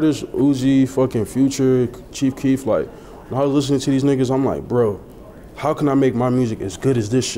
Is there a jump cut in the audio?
no; 0 cuts

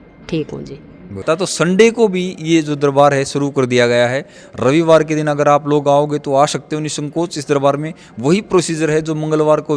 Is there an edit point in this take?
yes; 1 cut; at 1.2 s

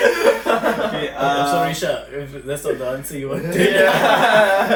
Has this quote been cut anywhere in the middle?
no; 0 cuts

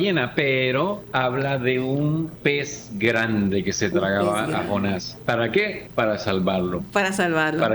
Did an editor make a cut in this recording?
yes; 4 cuts; at 1.0 s, 2.5 s, 5.1 s, 5.8 s

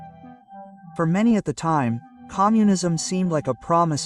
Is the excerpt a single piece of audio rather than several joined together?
no; 1 cut; at 0.9 s

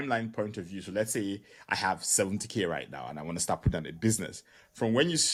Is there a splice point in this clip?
no; 0 cuts

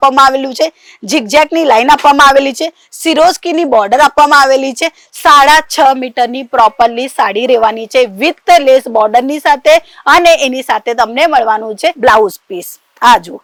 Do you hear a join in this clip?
no; 0 cuts

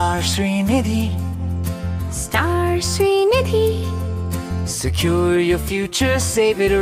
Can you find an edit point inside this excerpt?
no; 0 cuts

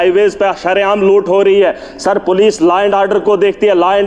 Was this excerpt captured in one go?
yes; 0 cuts

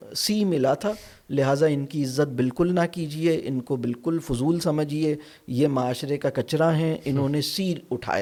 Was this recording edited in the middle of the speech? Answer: no; 0 cuts

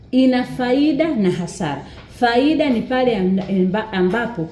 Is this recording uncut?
yes; 0 cuts

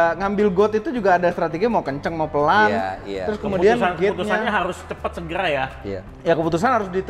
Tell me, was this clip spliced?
no; 0 cuts

